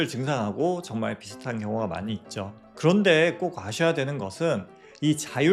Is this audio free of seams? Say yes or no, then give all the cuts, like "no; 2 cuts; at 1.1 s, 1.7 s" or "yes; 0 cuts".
no; 1 cut; at 2.6 s